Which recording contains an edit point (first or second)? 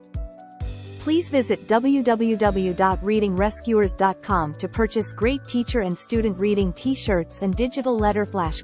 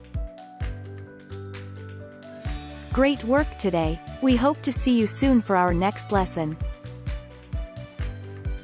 first